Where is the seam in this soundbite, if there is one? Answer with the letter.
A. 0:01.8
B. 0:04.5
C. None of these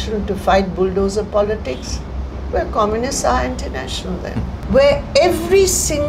B